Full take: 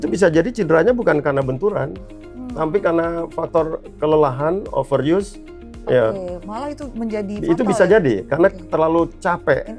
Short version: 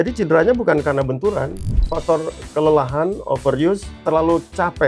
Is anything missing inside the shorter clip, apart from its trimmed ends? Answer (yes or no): yes